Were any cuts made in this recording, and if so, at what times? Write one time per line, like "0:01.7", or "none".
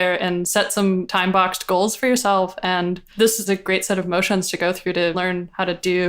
0:01.0
0:03.5
0:05.2